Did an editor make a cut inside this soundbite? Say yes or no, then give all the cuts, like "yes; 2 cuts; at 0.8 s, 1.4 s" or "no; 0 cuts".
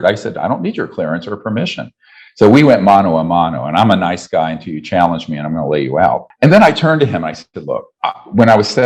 yes; 2 cuts; at 6.3 s, 7.9 s